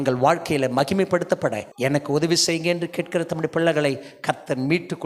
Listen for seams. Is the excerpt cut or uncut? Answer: cut